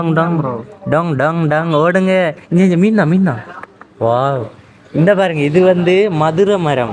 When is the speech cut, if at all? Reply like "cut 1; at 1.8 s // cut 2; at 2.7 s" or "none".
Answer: none

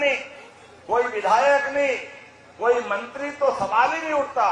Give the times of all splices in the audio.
none

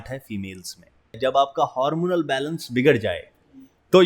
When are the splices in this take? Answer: cut 1; at 1.2 s

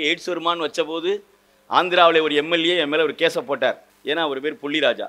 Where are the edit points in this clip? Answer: cut 1; at 3.9 s

